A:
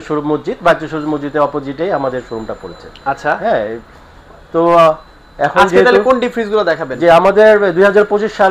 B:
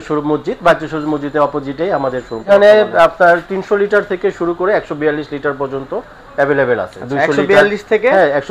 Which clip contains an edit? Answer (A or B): B